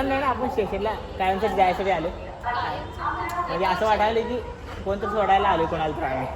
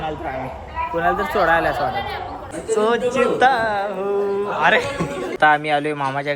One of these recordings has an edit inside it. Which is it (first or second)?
second